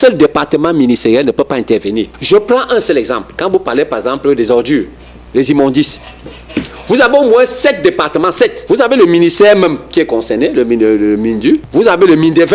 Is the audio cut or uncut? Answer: cut